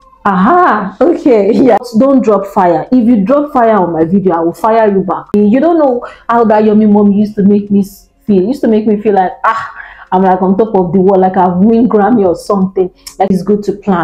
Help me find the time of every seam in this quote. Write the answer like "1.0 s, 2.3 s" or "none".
1.8 s, 5.3 s, 13.3 s